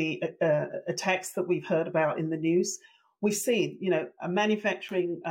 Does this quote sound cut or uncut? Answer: uncut